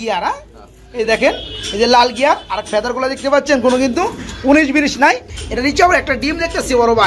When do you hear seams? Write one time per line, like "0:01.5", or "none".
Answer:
0:05.3